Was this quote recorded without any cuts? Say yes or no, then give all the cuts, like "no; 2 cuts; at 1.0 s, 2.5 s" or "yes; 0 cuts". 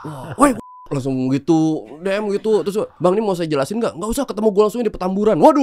no; 1 cut; at 2.9 s